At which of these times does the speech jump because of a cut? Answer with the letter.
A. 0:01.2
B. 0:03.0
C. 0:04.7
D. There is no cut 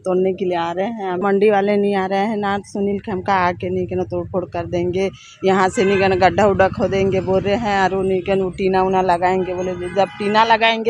A